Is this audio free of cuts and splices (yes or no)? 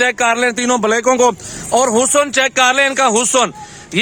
yes